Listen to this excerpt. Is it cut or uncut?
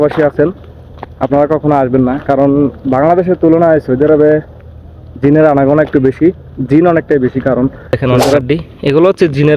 cut